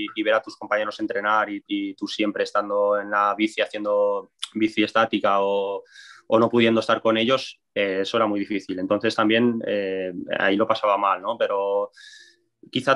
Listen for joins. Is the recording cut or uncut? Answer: uncut